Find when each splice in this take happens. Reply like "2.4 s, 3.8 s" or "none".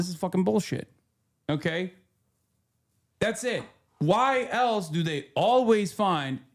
3.8 s

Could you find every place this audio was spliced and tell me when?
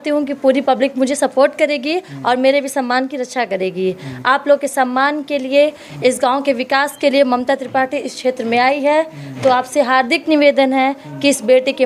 none

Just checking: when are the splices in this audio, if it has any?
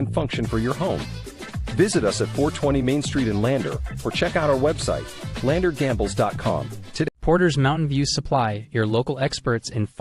7.1 s

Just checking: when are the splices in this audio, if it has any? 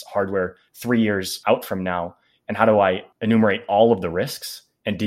1.3 s, 3.1 s

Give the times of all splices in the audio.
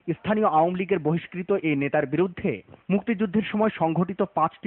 2.2 s

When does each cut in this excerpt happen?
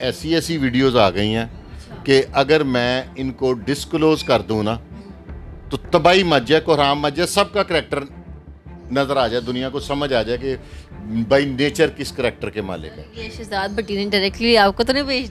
none

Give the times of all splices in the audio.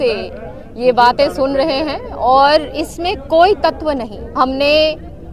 4.2 s

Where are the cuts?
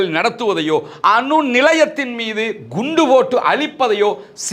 none

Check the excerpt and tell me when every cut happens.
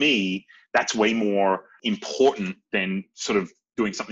1.7 s

